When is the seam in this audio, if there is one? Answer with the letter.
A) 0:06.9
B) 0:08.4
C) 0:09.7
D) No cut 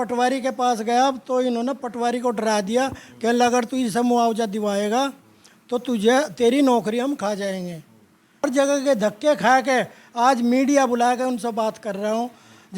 B